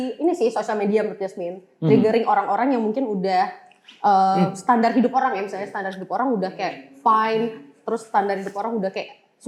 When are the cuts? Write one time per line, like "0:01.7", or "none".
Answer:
none